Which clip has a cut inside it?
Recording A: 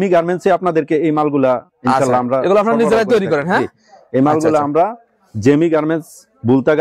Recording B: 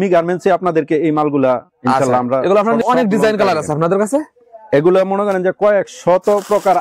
B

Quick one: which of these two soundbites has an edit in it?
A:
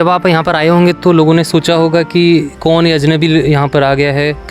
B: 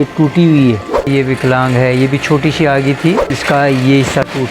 B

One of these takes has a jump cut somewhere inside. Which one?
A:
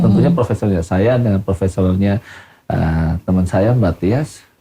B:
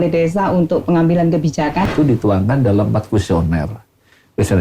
B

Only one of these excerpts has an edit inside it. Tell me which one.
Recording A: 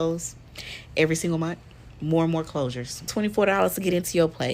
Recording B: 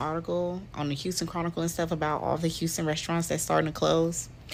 A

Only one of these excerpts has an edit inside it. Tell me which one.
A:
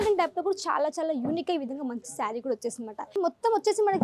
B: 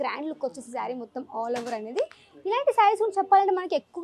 A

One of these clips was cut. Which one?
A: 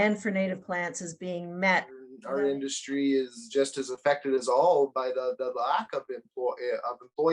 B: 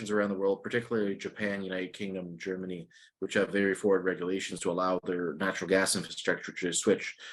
A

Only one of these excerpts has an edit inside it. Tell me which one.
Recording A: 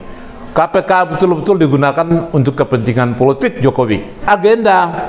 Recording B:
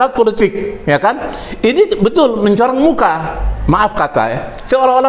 A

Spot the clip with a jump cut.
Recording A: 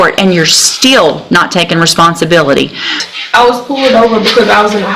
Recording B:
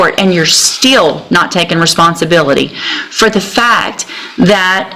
A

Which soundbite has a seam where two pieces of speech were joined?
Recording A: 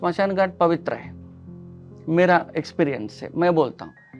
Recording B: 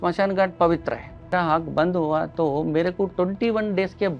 B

